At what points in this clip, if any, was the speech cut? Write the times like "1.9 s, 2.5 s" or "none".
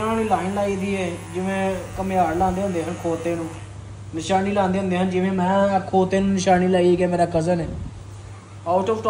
none

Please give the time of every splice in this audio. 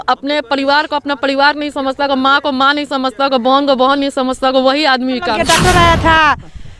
5.3 s

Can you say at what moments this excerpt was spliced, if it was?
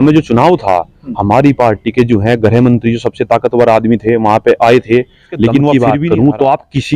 5.7 s

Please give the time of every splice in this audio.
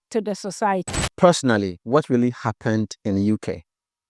1.0 s

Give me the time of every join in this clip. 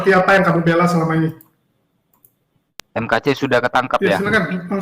2.8 s

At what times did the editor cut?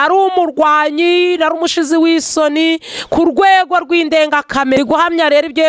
4.8 s

